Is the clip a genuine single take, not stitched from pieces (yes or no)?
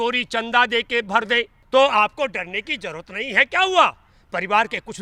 no